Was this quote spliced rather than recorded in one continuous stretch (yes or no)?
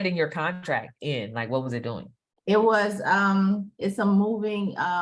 yes